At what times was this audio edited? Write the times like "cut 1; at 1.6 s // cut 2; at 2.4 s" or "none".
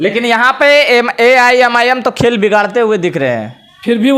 none

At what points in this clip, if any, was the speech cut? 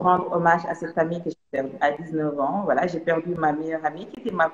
cut 1; at 1.8 s

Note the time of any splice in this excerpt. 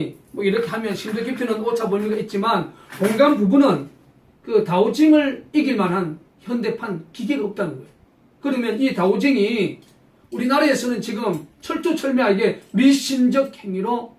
cut 1; at 1.1 s

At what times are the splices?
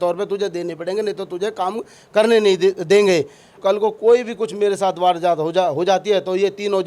cut 1; at 3.6 s

